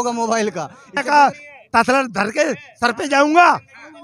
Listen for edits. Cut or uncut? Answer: cut